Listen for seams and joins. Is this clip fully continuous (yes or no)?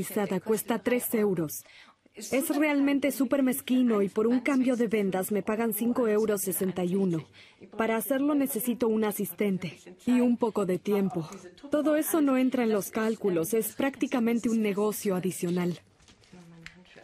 yes